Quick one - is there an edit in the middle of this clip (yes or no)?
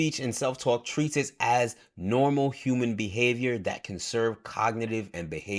no